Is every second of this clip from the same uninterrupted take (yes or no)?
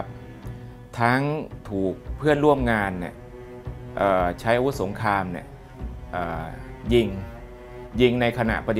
yes